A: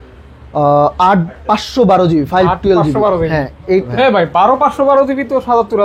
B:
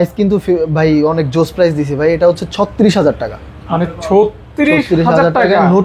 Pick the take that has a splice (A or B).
A